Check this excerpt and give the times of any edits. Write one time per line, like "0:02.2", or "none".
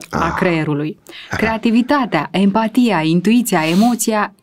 none